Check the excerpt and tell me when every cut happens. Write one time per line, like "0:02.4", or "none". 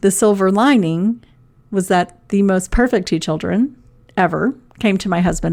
none